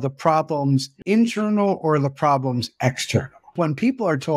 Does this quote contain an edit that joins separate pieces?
yes; 2 cuts; at 0.9 s, 3.5 s

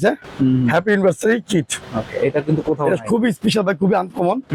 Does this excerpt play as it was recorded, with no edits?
yes; 0 cuts

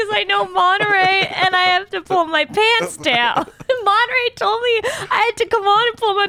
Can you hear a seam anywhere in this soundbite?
no; 0 cuts

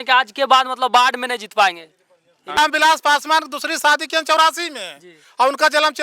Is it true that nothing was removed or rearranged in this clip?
no; 1 cut; at 2.6 s

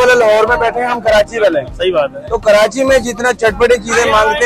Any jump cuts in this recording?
no; 0 cuts

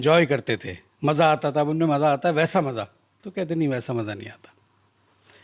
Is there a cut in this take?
no; 0 cuts

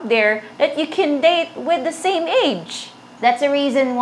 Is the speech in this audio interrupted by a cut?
yes; 1 cut; at 3.1 s

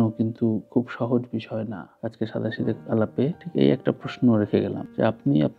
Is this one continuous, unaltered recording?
no; 1 cut; at 1.8 s

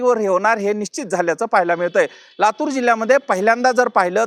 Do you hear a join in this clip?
no; 0 cuts

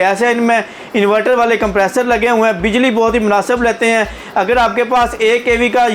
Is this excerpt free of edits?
yes; 0 cuts

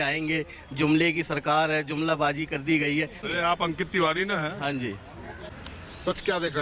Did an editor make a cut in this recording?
yes; 2 cuts; at 3.3 s, 5.5 s

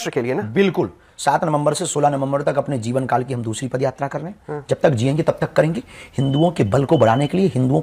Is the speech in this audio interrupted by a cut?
no; 0 cuts

